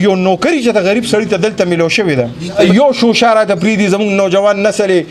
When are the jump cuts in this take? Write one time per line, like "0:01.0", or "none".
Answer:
0:02.6